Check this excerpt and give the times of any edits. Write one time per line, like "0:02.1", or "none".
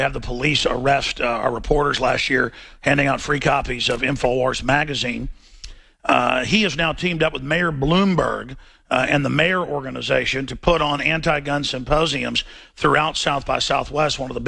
0:03.2